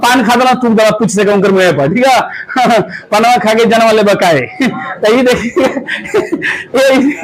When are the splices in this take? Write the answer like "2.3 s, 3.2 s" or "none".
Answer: none

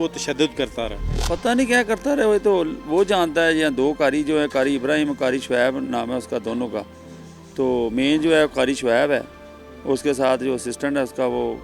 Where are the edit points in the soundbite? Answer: 1.1 s

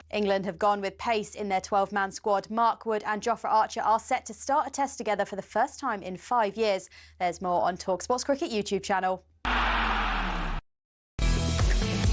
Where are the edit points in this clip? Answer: 10.7 s

